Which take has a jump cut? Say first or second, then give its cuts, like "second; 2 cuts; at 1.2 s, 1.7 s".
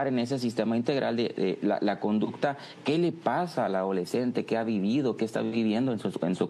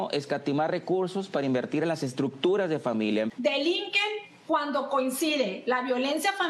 second; 1 cut; at 3.3 s